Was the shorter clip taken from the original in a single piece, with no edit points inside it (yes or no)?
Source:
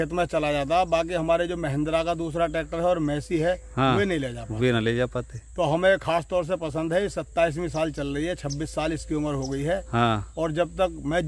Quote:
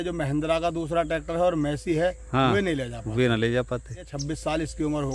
no